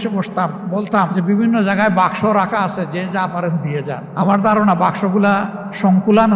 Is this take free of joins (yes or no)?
yes